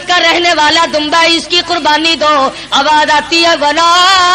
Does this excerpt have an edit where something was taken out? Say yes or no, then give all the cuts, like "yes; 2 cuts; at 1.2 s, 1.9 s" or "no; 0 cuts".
no; 0 cuts